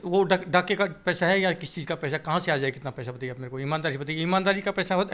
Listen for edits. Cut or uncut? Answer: uncut